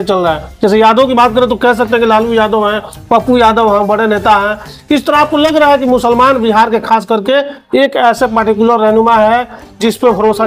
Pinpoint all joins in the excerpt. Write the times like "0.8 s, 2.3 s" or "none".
none